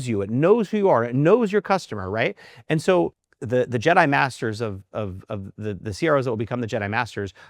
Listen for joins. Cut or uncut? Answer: cut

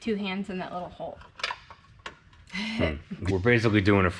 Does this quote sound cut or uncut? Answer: cut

